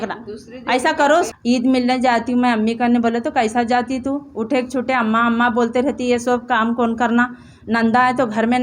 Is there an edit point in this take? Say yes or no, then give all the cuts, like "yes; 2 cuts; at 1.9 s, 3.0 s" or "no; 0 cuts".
yes; 1 cut; at 1.3 s